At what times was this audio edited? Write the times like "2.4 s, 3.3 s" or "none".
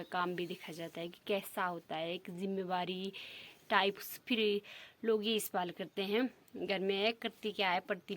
4.0 s